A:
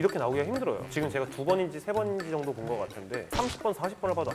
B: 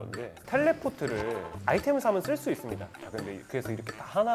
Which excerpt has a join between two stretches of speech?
B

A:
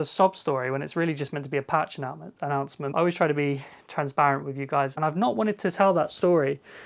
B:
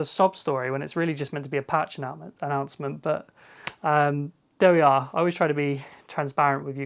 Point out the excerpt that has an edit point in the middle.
A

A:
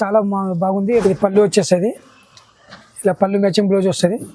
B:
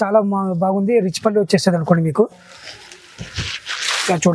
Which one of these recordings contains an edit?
A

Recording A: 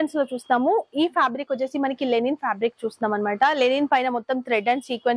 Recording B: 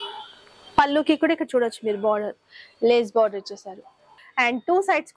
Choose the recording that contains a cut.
B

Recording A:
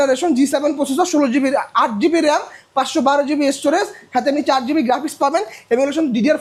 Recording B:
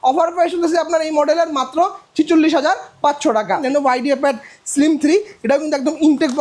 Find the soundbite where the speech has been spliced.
B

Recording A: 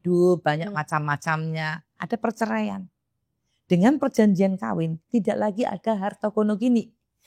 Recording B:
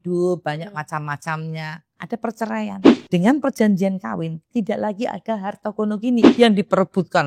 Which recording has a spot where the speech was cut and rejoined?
B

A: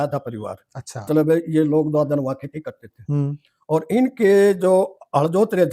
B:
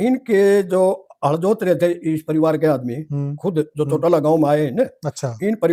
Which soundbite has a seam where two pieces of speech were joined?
A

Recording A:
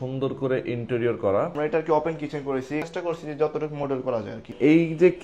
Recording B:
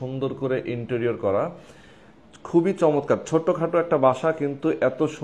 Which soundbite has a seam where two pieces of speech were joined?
A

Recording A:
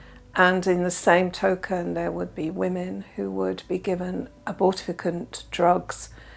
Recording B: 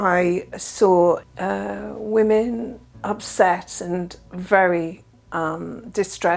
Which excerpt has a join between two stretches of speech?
B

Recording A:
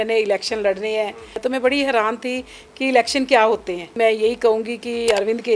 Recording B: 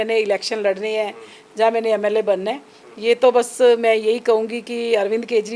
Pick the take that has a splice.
A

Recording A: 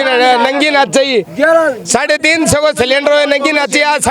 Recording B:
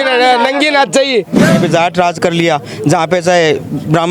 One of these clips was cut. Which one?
B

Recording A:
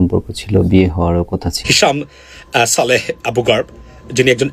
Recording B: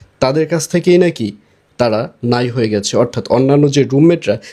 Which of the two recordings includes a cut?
A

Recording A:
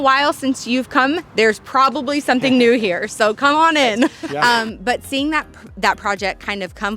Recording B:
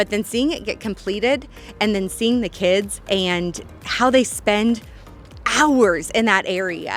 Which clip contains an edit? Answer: A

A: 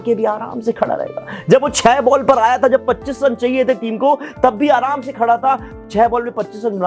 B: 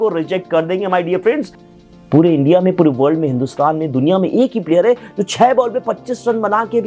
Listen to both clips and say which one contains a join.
B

